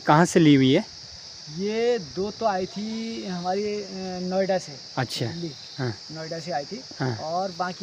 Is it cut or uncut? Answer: uncut